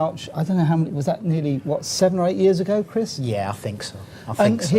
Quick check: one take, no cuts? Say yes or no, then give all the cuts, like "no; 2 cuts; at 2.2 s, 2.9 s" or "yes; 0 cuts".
no; 1 cut; at 2.0 s